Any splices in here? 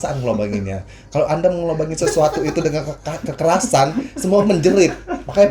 no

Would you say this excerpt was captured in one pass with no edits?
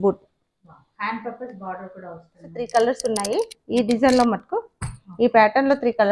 no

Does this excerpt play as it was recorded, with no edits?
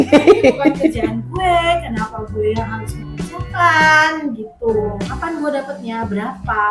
no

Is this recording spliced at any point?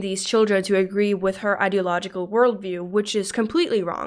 no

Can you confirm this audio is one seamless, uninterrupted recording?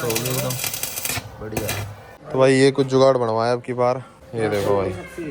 no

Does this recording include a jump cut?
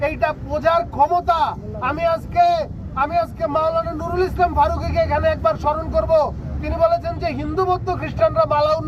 no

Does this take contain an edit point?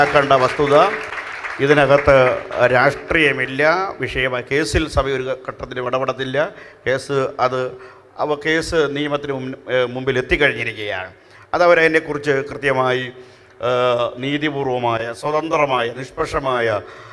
no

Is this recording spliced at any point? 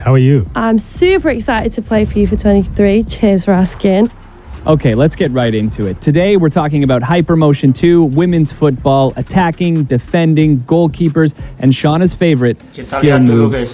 yes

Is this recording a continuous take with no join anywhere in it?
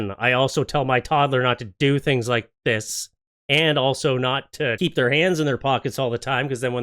yes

